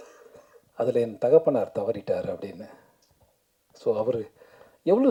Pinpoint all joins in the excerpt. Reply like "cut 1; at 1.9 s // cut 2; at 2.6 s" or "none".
none

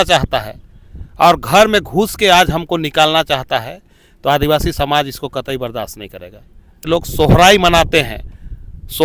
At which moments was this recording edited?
cut 1; at 6.9 s

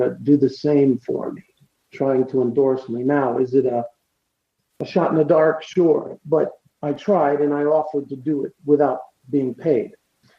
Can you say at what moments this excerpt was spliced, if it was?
cut 1; at 1.4 s

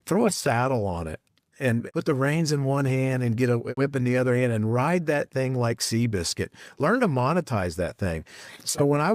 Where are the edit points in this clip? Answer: cut 1; at 1.9 s // cut 2; at 3.7 s

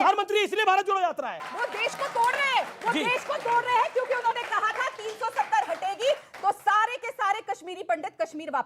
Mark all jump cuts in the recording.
cut 1; at 1.4 s

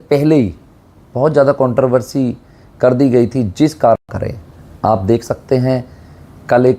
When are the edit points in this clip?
cut 1; at 4.0 s

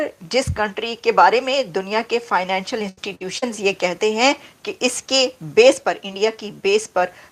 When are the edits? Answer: none

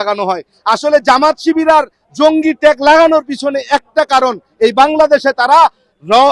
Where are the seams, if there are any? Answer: none

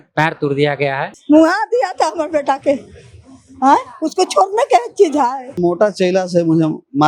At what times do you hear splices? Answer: cut 1; at 1.1 s // cut 2; at 5.6 s

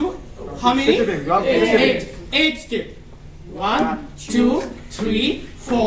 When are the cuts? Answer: none

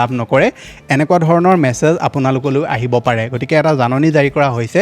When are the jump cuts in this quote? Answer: none

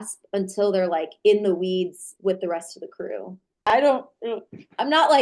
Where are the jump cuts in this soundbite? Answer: cut 1; at 3.6 s

